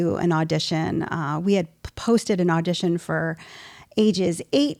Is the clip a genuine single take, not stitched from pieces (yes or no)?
yes